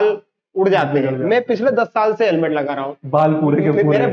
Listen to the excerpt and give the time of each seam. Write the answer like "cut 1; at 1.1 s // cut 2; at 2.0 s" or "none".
none

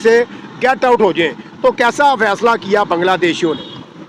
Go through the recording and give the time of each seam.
none

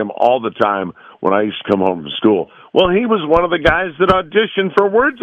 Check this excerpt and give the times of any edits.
none

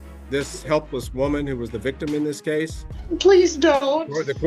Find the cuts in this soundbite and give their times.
cut 1; at 2.9 s

